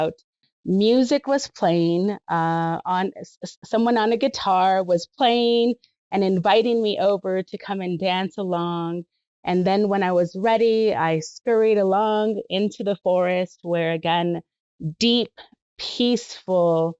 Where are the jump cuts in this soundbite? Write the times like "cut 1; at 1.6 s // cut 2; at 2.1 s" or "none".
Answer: none